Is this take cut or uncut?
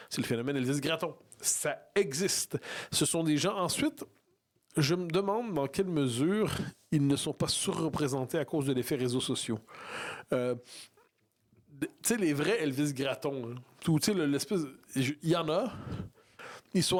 uncut